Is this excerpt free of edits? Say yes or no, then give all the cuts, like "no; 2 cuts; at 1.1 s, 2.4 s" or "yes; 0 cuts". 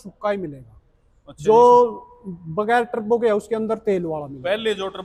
yes; 0 cuts